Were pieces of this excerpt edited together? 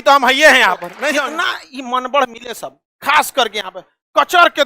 yes; 1 cut; at 1.2 s

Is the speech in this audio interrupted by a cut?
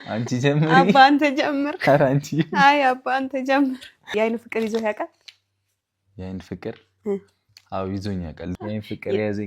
yes; 2 cuts; at 4.1 s, 8.5 s

